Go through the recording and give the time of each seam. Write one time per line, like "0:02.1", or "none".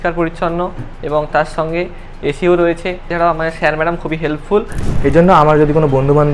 0:03.0
0:04.8